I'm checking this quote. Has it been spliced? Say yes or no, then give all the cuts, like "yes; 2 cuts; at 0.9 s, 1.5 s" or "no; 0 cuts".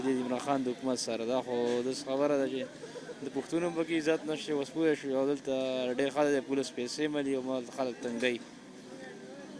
no; 0 cuts